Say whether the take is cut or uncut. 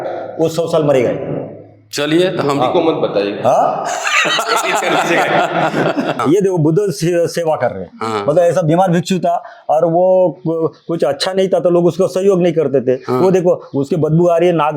cut